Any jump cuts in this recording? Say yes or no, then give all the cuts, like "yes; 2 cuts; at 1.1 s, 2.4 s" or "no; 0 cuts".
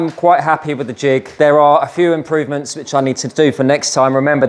yes; 1 cut; at 1.3 s